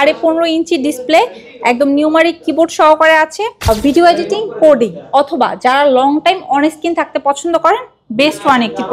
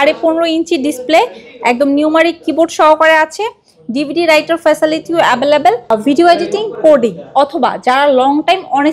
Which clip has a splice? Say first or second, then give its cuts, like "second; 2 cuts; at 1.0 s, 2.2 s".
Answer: first; 1 cut; at 3.6 s